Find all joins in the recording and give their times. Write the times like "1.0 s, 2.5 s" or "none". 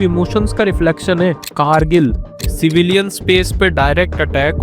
1.9 s